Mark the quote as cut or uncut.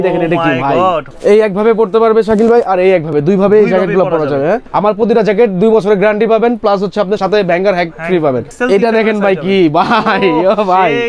cut